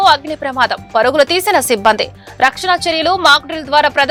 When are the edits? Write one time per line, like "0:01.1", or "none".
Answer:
none